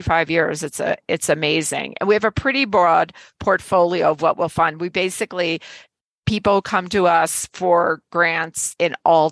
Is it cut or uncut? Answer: uncut